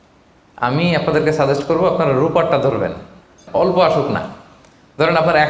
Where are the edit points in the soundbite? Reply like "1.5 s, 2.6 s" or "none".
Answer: 3.4 s